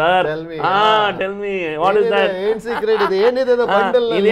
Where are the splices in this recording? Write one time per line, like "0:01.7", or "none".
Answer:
none